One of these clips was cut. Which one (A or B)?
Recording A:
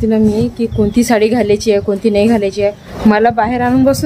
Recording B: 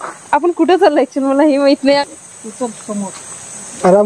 A